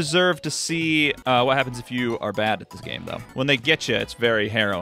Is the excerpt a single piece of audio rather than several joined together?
no; 1 cut; at 1.2 s

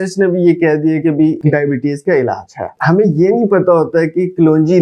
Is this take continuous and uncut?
no; 2 cuts; at 1.4 s, 2.7 s

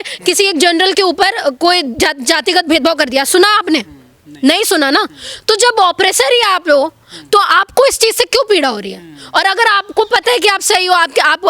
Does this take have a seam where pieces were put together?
no; 0 cuts

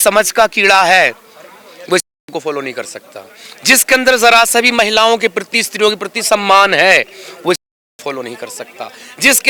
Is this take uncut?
yes; 0 cuts

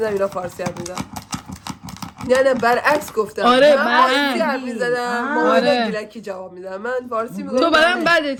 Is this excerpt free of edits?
yes; 0 cuts

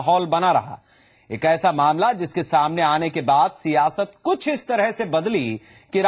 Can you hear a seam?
yes; 1 cut; at 2.6 s

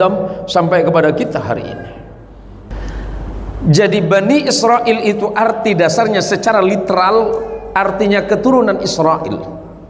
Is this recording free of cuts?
no; 1 cut; at 2.7 s

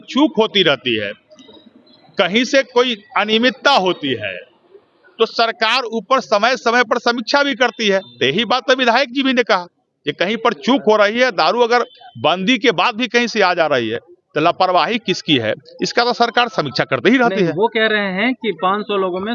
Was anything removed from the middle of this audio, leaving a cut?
no; 0 cuts

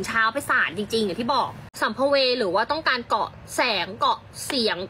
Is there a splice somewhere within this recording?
yes; 1 cut; at 1.6 s

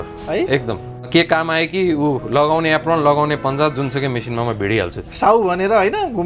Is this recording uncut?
no; 1 cut; at 1.1 s

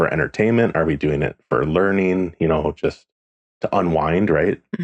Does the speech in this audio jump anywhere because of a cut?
no; 0 cuts

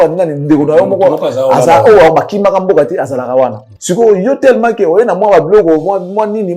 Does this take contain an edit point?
yes; 1 cut; at 3.7 s

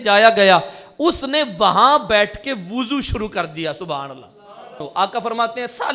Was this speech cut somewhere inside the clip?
yes; 1 cut; at 4.8 s

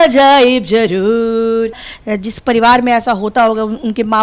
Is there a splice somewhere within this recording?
yes; 1 cut; at 1.9 s

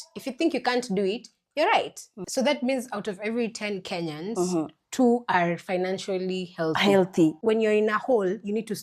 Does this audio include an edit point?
yes; 2 cuts; at 2.2 s, 7.4 s

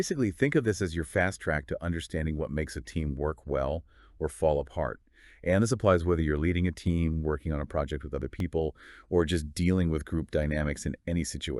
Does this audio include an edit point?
yes; 1 cut; at 9.5 s

